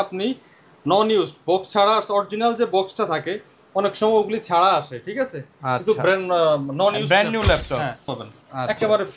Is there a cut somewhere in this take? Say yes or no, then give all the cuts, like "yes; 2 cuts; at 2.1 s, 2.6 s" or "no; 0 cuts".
yes; 1 cut; at 8.1 s